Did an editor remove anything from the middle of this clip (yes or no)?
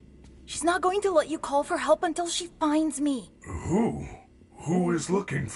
no